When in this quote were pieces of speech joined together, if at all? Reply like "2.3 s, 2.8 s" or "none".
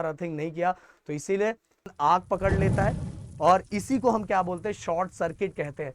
1.9 s